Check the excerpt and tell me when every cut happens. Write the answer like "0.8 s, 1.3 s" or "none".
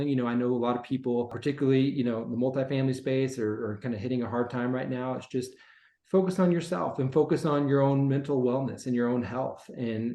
1.3 s